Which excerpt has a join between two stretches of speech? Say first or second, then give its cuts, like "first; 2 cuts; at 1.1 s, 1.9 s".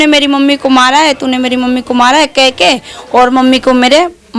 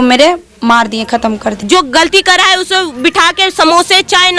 second; 1 cut; at 1.6 s